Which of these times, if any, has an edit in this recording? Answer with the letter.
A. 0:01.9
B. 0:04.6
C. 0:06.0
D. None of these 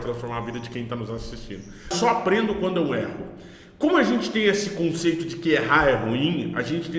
A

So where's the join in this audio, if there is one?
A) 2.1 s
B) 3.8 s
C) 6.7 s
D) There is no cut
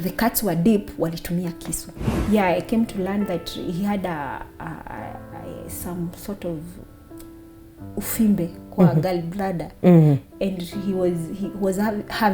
A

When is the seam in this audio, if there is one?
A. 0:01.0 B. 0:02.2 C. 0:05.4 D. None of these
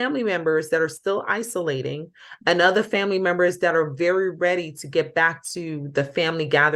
D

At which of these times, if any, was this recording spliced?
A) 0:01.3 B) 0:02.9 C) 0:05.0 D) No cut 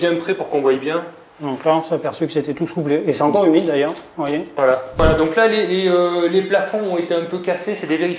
C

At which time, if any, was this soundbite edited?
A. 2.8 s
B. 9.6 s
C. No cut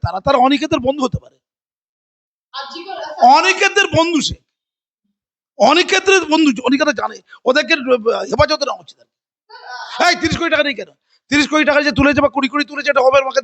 C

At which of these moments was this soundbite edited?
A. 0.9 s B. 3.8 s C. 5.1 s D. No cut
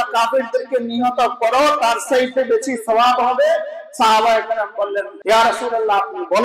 C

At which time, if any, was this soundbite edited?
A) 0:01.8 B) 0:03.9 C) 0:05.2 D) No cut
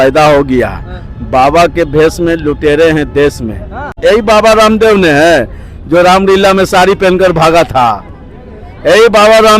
B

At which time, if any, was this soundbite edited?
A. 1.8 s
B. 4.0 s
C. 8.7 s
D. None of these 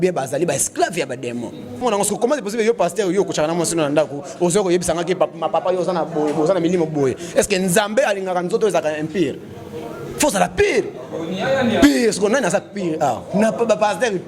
A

